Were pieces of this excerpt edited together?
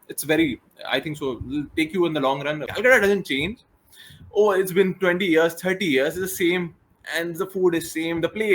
yes; 1 cut; at 2.7 s

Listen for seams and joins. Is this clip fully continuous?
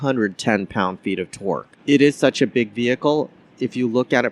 no; 1 cut; at 1.7 s

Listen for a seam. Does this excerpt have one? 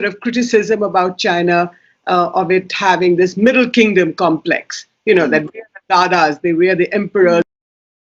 no; 0 cuts

